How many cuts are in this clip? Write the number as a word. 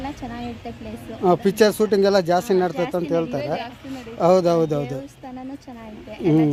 zero